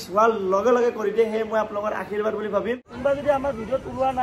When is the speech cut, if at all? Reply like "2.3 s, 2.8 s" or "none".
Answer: 2.9 s